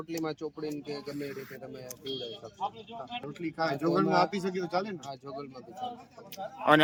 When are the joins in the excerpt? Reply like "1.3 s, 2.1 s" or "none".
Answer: none